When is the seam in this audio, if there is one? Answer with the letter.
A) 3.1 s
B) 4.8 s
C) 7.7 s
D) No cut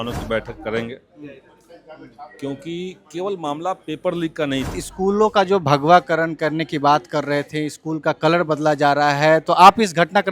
B